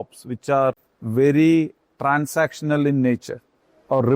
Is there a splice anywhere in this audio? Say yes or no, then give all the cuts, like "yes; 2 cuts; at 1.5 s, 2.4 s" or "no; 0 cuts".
yes; 1 cut; at 0.9 s